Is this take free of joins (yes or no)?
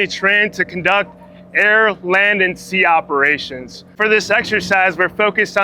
yes